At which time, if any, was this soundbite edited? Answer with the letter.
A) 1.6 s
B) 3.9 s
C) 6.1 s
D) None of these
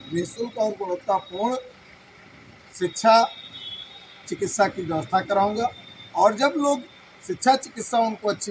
D